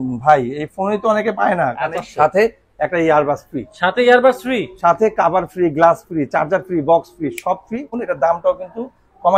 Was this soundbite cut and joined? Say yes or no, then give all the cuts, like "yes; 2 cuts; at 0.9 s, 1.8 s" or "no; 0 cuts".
yes; 2 cuts; at 1.9 s, 8.0 s